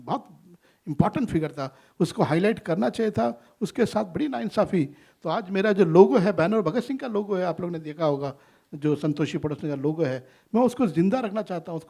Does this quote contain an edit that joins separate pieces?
no; 0 cuts

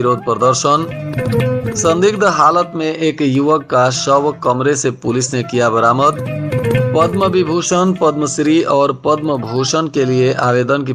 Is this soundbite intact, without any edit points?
yes; 0 cuts

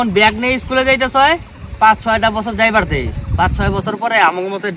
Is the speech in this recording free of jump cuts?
yes; 0 cuts

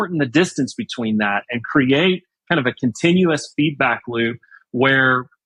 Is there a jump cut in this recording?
no; 0 cuts

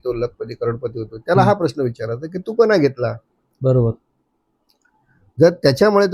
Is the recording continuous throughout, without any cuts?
yes; 0 cuts

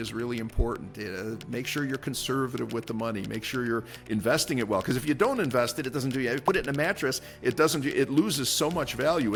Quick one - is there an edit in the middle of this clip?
no; 0 cuts

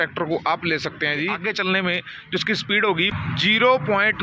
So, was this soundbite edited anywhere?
yes; 2 cuts; at 1.4 s, 3.1 s

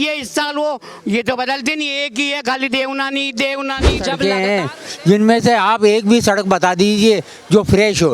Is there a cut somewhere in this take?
yes; 1 cut; at 4.2 s

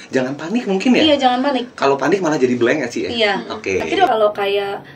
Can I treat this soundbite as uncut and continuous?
no; 1 cut; at 4.0 s

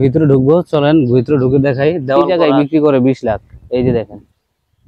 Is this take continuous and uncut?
no; 1 cut; at 2.4 s

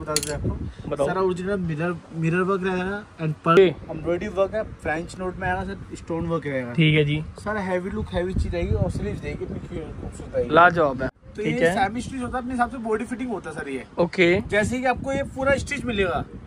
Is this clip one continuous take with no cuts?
no; 2 cuts; at 3.6 s, 11.2 s

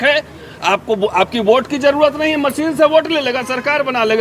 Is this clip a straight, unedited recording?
yes; 0 cuts

